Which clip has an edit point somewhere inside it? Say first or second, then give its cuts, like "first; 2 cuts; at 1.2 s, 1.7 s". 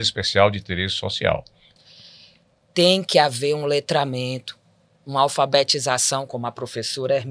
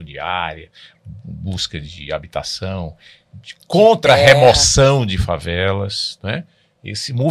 first; 1 cut; at 1.8 s